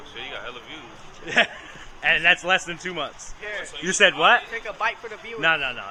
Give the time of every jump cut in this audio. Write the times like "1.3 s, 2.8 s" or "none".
none